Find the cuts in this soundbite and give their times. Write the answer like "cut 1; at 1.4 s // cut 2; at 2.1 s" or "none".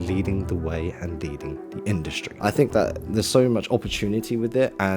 cut 1; at 2.2 s